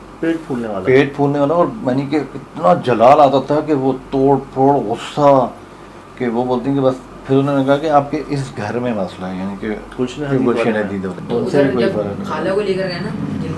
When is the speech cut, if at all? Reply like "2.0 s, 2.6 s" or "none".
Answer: 11.2 s